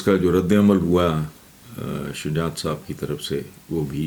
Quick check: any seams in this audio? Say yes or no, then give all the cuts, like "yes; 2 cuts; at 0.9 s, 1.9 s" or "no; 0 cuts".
no; 0 cuts